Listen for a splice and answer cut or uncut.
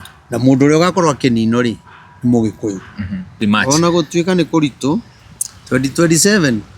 cut